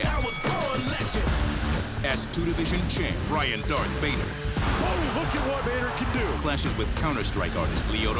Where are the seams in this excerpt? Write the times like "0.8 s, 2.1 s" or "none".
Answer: none